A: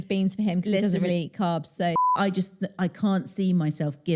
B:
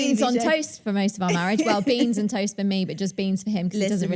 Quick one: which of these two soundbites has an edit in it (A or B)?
A